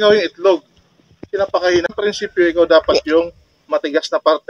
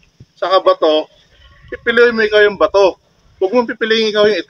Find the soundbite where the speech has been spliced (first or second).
first